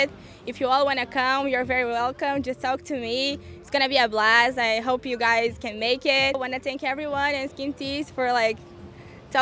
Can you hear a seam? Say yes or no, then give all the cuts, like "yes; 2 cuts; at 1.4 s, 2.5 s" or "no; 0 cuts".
yes; 1 cut; at 6.4 s